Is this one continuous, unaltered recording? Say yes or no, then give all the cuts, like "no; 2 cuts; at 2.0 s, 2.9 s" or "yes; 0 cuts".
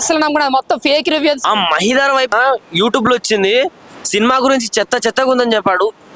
no; 2 cuts; at 1.4 s, 2.3 s